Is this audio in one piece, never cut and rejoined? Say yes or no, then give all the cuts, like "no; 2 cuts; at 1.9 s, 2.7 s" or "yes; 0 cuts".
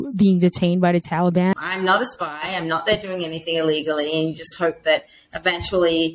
no; 1 cut; at 1.5 s